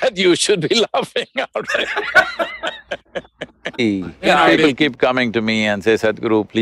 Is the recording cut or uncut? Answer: cut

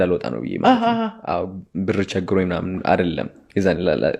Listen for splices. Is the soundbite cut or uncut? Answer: uncut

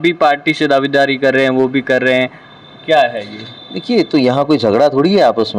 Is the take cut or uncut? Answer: uncut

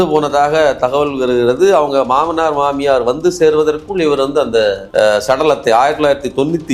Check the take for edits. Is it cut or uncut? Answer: uncut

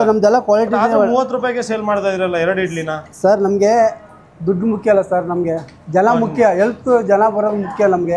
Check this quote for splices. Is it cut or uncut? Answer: uncut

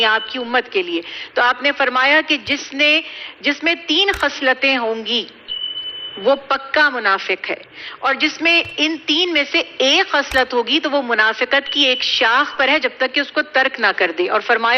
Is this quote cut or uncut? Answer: uncut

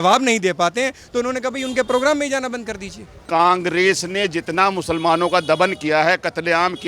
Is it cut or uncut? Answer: cut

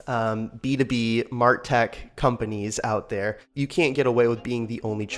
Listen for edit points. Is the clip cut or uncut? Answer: cut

